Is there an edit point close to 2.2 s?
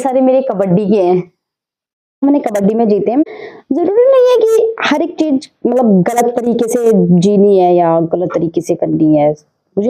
yes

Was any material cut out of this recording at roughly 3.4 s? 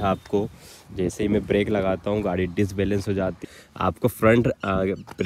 yes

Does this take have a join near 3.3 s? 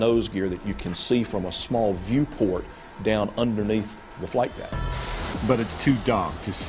yes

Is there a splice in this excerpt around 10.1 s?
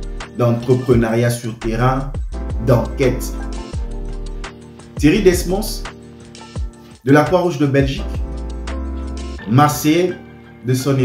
no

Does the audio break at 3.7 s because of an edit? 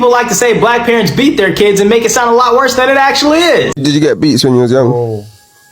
yes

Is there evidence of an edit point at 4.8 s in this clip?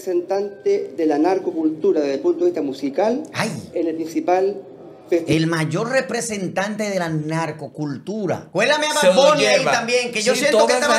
no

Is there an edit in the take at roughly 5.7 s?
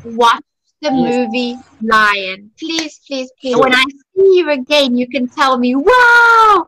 no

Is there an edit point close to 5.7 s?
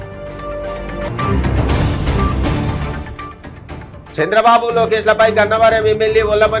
no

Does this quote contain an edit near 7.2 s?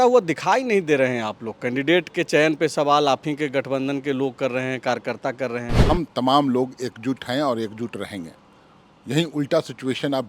no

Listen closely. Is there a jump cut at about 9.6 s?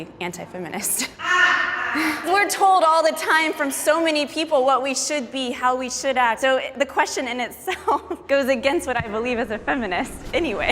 no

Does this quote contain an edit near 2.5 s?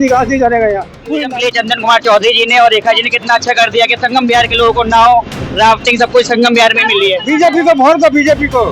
no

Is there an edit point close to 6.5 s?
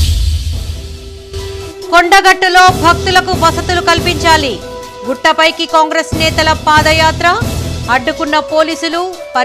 no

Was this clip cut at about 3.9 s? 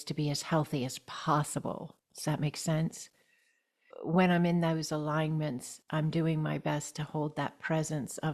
yes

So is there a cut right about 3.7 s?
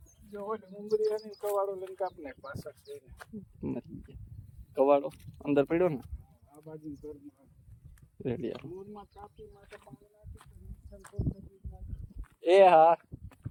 no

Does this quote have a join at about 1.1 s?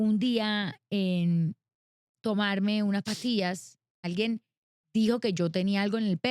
no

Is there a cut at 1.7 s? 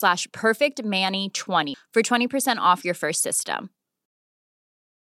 yes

